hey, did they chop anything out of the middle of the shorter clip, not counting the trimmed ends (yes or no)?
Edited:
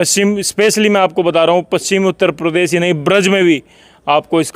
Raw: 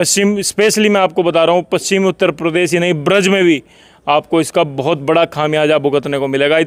no